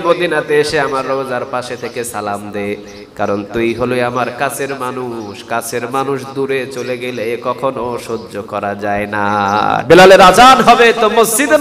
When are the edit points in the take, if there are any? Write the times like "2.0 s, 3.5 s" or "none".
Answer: 9.8 s